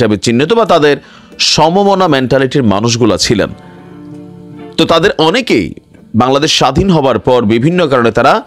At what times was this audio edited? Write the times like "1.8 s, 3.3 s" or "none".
none

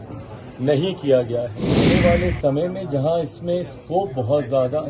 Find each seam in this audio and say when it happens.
2.0 s

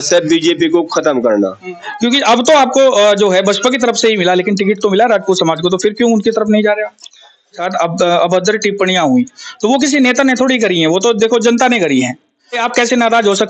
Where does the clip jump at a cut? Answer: 1.8 s, 7.6 s, 12.6 s

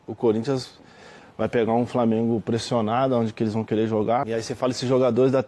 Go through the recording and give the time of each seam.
4.2 s

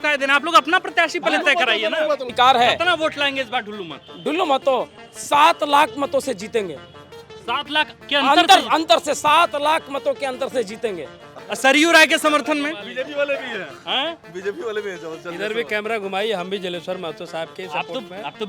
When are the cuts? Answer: 2.3 s, 11.2 s

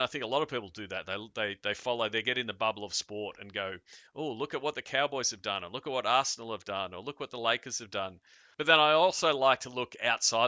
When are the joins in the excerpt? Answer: 8.4 s

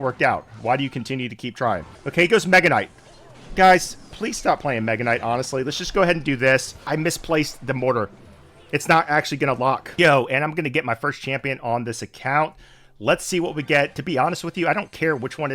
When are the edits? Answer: 2.0 s, 6.9 s, 9.9 s

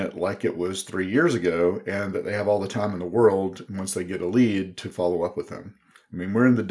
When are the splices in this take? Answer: none

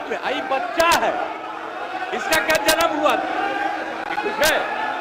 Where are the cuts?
none

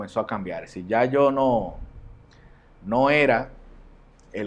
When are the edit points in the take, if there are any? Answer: none

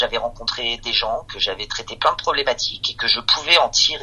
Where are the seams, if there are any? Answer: none

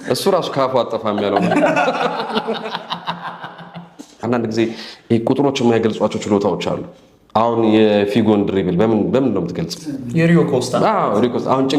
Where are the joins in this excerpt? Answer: 4.2 s

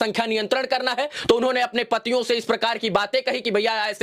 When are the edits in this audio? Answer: none

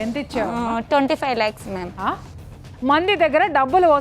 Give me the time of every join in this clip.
2.3 s

